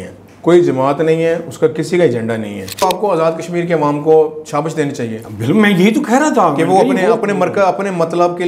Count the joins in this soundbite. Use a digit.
1